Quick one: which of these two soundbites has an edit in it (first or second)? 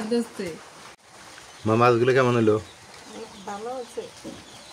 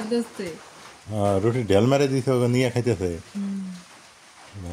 first